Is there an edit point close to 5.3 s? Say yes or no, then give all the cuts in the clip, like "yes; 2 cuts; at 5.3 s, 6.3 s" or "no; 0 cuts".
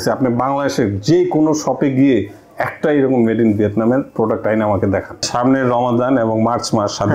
yes; 1 cut; at 5.3 s